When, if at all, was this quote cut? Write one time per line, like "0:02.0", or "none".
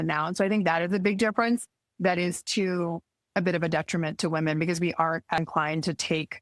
0:05.4